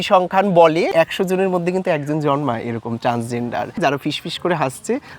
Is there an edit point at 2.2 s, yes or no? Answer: no